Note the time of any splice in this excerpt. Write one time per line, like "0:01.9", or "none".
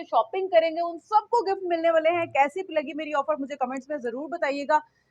none